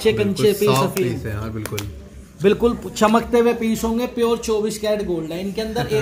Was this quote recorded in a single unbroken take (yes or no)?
yes